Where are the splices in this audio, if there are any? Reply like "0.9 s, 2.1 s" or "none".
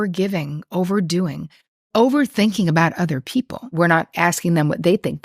3.7 s